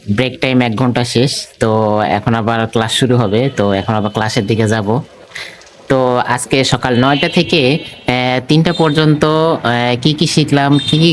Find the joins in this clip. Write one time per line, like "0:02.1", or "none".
none

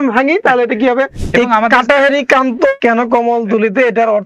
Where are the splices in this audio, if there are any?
0:01.2
0:02.8

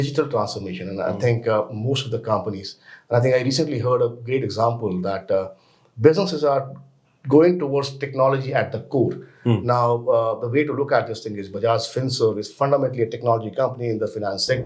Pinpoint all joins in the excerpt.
none

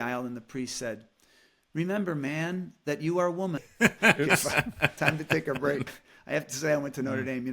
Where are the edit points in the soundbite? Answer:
0:03.7
0:06.1

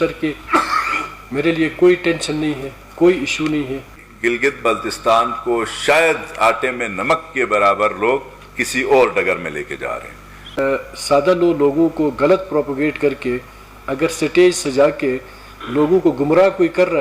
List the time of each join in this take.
0:03.8
0:10.6

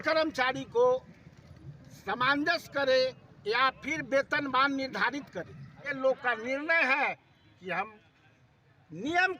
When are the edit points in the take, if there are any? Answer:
0:05.9

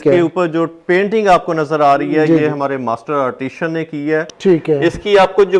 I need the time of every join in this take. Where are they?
0:04.3

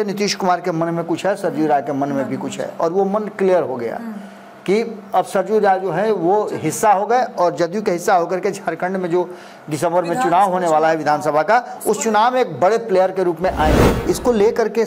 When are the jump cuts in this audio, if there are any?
0:14.0

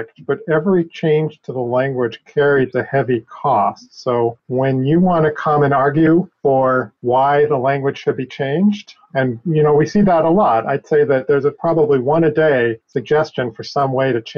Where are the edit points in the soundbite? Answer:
0:04.4
0:06.7
0:12.9

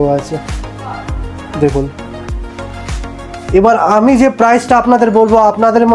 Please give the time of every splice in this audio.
none

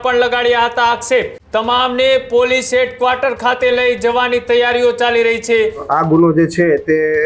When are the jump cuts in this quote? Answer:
0:01.4
0:05.8

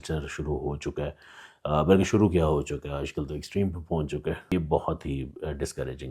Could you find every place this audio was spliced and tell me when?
0:04.5

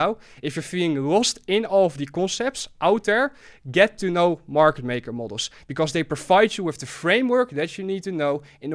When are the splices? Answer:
none

